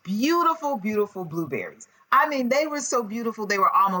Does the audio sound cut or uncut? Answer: uncut